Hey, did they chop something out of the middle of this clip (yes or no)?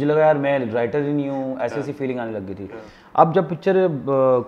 yes